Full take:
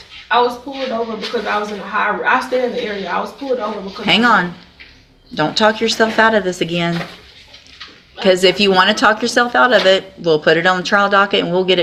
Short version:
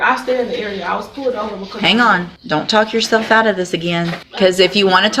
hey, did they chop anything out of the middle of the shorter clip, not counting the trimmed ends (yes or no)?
yes